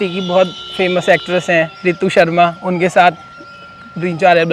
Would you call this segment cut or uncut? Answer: uncut